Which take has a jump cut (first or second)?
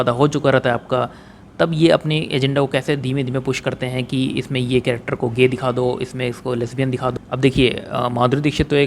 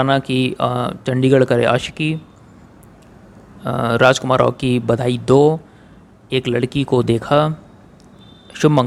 first